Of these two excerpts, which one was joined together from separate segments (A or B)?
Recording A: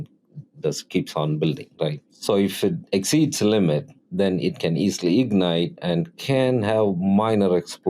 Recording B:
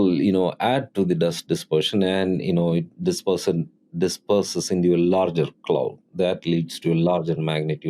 A